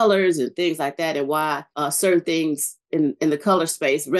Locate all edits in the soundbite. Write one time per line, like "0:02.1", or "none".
0:01.7